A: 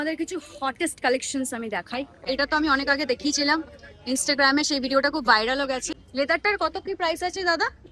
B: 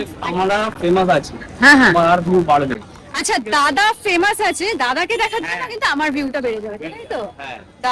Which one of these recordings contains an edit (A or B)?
A